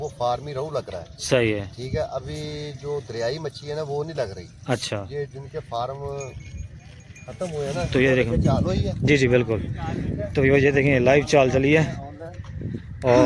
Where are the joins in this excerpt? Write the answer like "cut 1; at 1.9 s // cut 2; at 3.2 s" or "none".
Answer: none